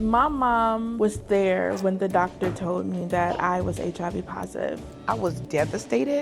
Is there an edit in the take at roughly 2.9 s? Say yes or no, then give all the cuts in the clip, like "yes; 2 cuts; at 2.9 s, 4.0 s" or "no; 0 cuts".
no; 2 cuts; at 0.9 s, 4.8 s